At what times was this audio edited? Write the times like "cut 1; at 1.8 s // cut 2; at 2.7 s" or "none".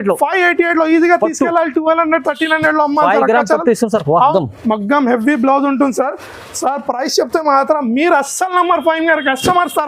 cut 1; at 4.3 s